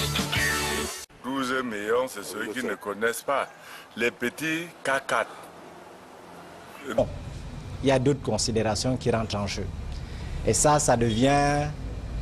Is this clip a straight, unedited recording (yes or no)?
yes